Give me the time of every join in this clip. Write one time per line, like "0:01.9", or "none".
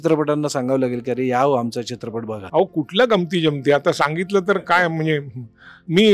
0:01.9